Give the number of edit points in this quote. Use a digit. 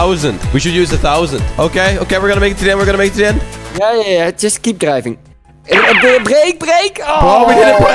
1